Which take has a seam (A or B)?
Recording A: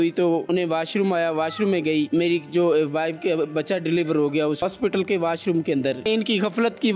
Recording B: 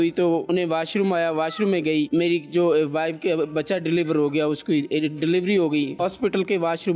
A